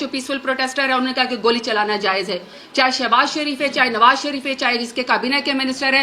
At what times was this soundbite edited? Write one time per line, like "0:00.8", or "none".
0:02.6